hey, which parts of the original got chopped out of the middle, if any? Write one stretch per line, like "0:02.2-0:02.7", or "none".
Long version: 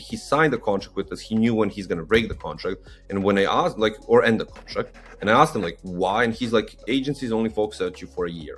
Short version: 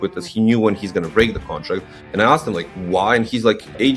0:02.9-0:05.0

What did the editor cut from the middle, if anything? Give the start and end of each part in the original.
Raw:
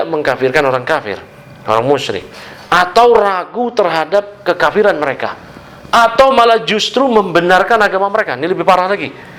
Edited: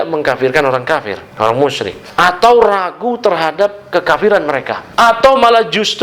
0:01.2-0:01.5
0:02.3-0:02.5
0:05.3-0:05.7

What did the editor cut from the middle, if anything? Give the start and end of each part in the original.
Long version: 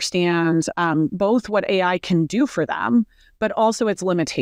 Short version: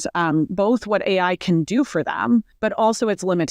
0:03.1-0:03.3

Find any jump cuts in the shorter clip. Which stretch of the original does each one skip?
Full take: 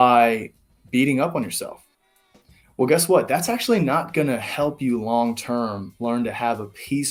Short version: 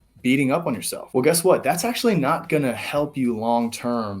0:01.6-0:02.6

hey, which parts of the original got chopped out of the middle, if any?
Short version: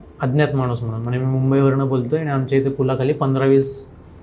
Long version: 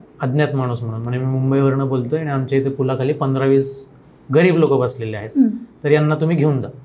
none

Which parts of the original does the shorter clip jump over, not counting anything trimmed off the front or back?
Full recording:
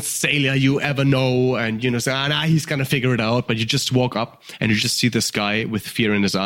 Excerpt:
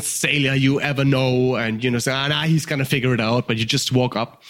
none

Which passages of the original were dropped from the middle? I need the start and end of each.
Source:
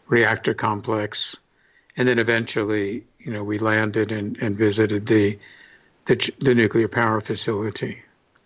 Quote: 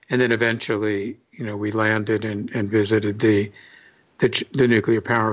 none

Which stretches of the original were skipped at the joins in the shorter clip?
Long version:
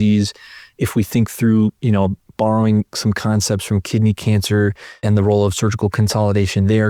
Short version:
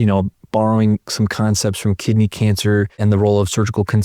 0:04.8-0:05.0

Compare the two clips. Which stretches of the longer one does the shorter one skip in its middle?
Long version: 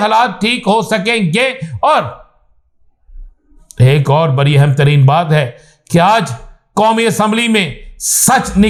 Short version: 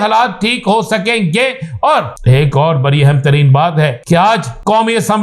0:02.1-0:03.7
0:05.8-0:06.4

